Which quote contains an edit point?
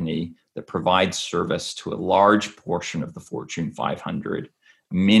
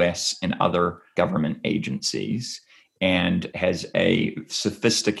second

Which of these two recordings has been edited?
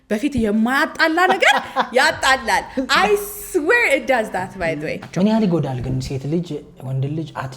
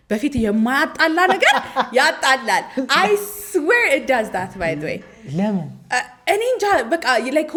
first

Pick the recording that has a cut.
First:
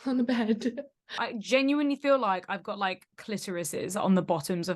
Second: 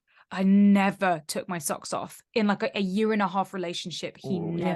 first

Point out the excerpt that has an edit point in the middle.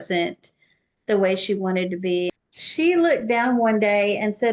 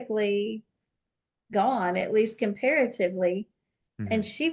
first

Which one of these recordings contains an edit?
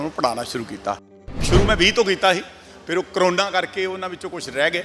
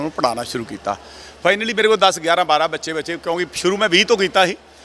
first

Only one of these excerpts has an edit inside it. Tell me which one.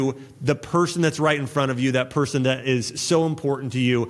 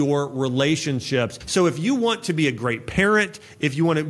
second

